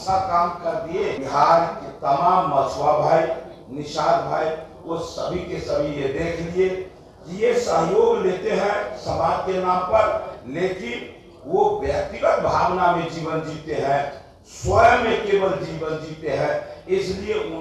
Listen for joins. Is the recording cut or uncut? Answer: cut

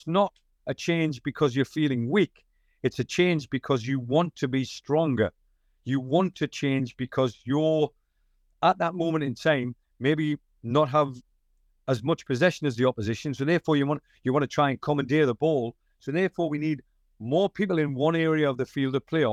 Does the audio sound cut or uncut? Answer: uncut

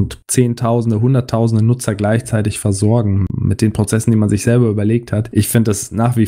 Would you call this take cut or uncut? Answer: cut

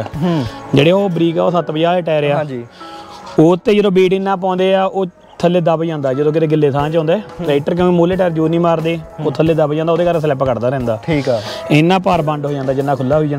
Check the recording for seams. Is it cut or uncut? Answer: uncut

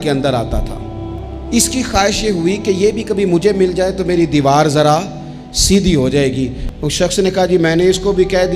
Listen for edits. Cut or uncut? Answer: cut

